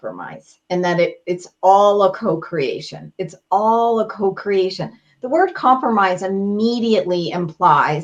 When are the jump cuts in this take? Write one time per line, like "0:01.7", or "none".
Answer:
none